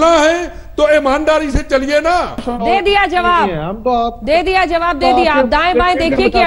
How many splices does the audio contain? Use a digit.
1